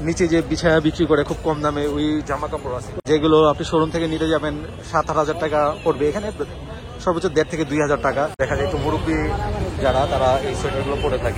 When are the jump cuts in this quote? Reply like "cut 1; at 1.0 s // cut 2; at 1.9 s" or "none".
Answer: cut 1; at 2.9 s // cut 2; at 8.4 s